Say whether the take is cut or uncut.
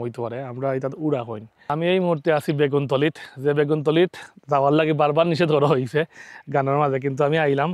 cut